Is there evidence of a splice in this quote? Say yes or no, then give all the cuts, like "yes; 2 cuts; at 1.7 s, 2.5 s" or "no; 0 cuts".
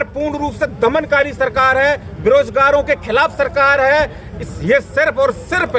no; 0 cuts